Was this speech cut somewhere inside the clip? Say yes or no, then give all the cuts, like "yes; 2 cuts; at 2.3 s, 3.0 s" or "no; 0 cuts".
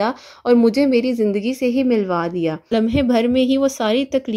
yes; 1 cut; at 2.7 s